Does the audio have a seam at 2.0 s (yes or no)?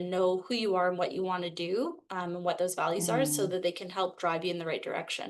no